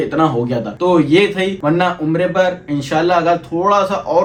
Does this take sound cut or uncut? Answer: uncut